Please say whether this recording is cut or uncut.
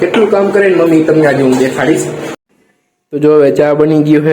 cut